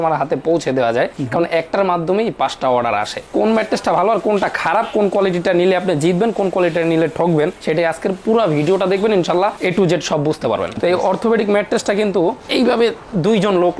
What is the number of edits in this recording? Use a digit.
2